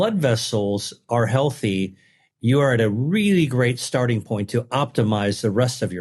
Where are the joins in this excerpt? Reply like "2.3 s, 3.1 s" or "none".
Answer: none